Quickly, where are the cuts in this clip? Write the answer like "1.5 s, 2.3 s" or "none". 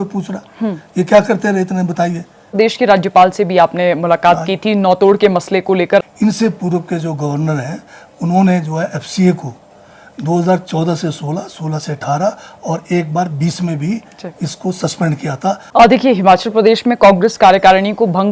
2.6 s, 5.9 s, 15.6 s